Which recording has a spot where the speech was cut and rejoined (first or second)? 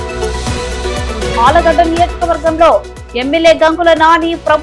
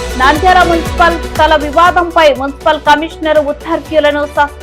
first